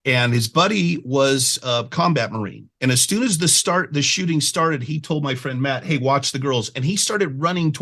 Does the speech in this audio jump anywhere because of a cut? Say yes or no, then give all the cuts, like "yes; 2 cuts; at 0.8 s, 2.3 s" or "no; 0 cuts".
no; 0 cuts